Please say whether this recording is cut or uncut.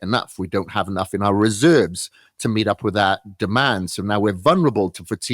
uncut